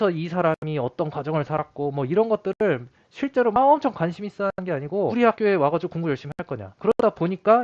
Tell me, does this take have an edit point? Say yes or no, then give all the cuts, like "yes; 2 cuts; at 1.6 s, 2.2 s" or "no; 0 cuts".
yes; 2 cuts; at 5.0 s, 6.7 s